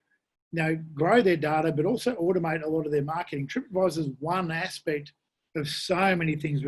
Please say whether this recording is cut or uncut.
uncut